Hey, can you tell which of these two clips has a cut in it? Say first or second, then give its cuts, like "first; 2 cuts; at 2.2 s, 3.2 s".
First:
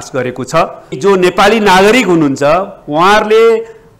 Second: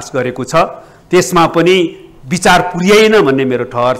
first; 1 cut; at 0.9 s